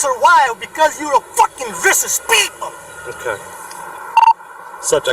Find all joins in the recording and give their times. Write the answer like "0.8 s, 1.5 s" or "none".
3.6 s